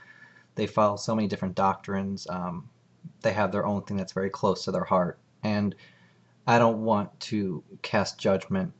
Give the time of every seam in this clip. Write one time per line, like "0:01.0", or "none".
0:02.4